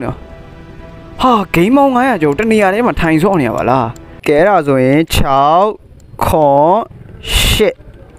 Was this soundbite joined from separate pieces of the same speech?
yes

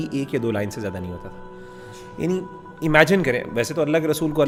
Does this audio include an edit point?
no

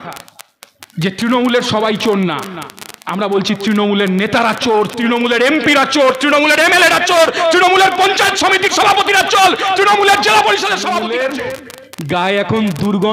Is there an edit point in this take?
yes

